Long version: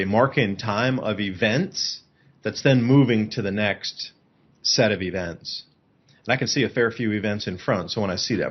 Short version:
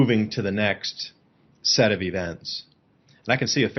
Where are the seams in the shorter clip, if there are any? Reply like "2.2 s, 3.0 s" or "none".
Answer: none

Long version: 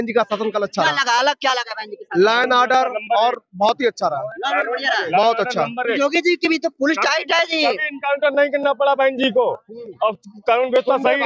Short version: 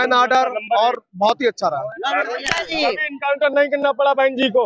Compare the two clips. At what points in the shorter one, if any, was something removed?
2.5 s

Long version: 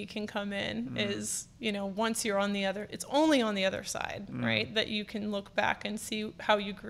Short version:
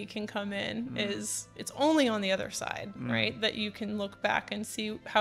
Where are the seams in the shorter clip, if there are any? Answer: 1.5 s

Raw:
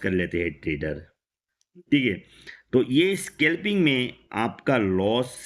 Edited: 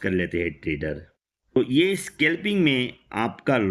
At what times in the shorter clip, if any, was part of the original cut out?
1.6 s

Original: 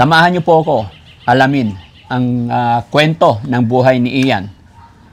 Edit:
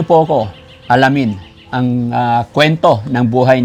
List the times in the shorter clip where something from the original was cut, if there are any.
none

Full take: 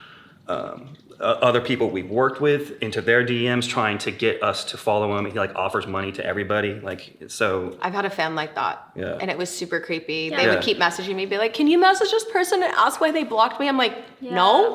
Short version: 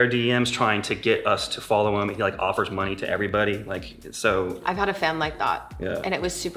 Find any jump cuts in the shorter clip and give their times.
none

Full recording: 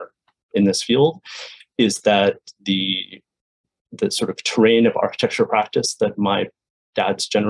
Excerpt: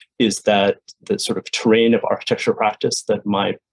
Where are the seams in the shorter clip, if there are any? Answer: 0.9 s

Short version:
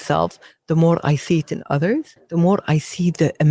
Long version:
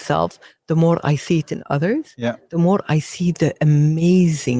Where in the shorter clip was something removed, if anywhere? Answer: 2.2 s

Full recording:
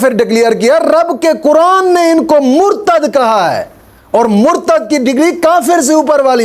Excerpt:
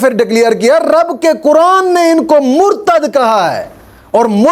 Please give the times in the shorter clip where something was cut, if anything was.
none

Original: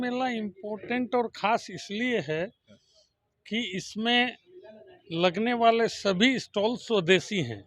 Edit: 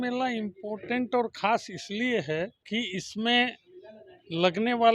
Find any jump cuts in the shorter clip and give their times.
2.6 s

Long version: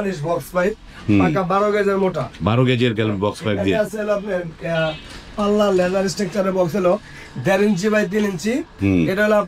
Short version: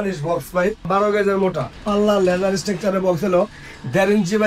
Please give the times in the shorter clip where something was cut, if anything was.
0.8 s, 1.7 s

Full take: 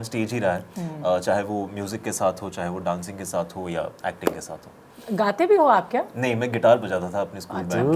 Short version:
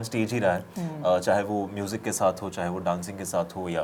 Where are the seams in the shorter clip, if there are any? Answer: none

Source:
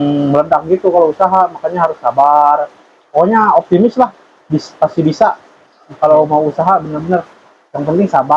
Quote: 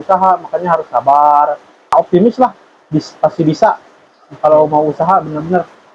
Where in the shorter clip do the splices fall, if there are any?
1.9 s

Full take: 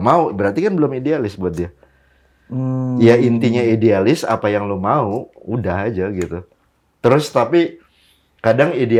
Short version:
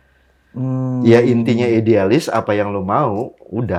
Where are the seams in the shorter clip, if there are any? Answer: none

